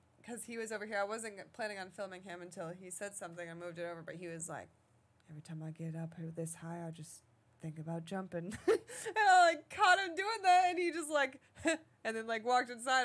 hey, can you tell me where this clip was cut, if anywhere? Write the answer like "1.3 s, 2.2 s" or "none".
none